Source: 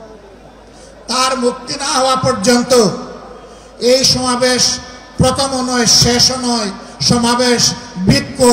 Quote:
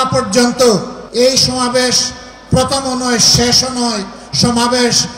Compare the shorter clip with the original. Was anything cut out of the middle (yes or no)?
yes